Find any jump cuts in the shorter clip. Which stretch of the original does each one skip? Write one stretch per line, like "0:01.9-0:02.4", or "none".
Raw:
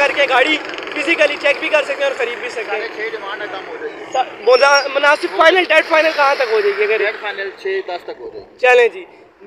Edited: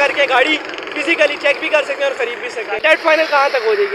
0:02.8-0:05.7